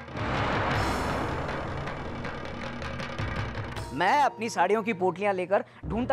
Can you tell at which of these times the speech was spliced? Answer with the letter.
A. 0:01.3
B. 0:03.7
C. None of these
B